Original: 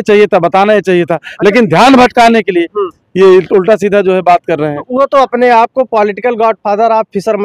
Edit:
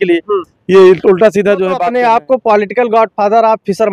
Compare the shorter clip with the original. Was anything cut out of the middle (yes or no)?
yes